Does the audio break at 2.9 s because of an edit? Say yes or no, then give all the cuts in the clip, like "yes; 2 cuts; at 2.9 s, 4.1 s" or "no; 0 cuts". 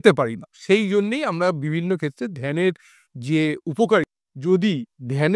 no; 1 cut; at 4.2 s